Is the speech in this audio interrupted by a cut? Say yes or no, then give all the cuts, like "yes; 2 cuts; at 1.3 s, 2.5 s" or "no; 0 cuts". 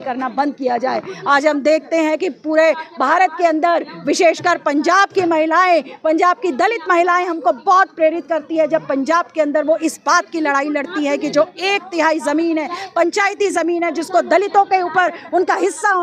no; 0 cuts